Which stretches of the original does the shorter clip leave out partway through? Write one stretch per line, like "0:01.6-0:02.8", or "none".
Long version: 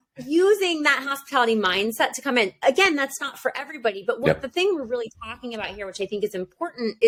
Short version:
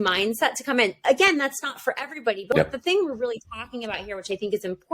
0:04.1-0:04.2